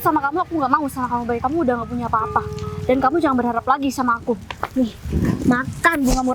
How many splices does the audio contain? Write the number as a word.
zero